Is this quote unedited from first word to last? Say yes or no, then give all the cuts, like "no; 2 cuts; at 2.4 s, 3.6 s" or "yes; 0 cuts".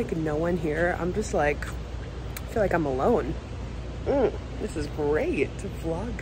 yes; 0 cuts